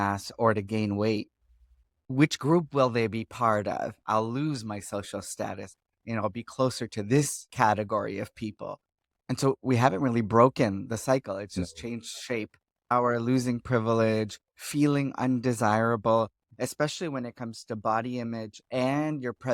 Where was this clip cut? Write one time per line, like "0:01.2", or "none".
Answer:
0:03.9
0:07.4
0:12.7